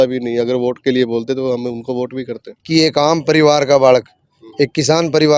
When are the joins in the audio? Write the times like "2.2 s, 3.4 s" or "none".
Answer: 2.5 s